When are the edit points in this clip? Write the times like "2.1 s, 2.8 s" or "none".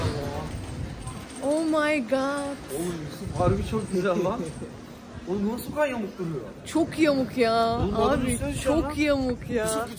none